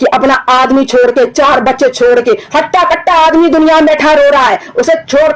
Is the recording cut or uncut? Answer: uncut